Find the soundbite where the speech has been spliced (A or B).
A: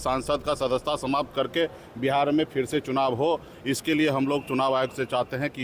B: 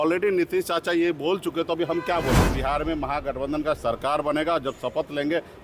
B